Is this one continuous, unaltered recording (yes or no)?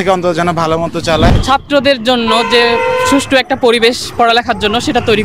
no